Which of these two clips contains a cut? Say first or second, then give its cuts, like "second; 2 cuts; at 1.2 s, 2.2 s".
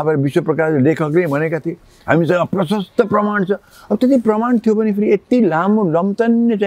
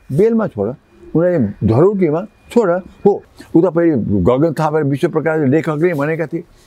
second; 1 cut; at 3.3 s